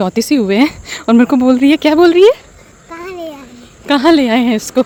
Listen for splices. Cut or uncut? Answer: uncut